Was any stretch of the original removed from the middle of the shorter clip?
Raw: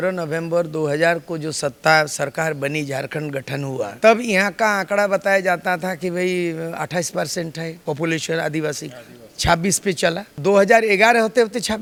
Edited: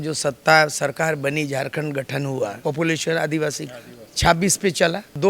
yes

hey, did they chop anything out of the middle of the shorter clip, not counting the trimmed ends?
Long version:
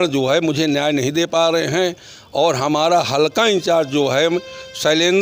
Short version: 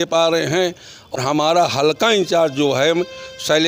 yes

